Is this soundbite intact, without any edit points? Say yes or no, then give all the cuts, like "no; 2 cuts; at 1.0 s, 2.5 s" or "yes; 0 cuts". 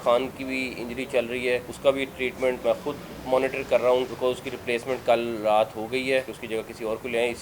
no; 4 cuts; at 1.7 s, 2.6 s, 4.1 s, 6.4 s